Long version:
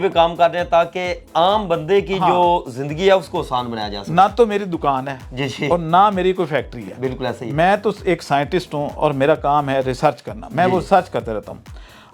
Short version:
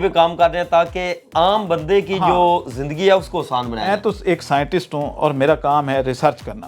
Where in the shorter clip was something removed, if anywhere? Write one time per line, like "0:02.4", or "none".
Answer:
0:03.9